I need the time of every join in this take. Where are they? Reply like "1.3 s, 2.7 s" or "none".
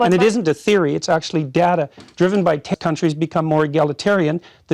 2.7 s